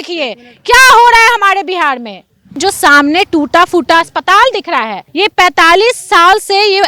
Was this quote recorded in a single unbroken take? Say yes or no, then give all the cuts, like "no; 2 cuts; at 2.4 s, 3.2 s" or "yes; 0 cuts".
no; 2 cuts; at 2.6 s, 5.0 s